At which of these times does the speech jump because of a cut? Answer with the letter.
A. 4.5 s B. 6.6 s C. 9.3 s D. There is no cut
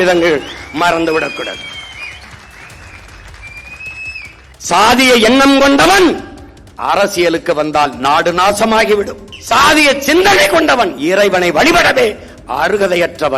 A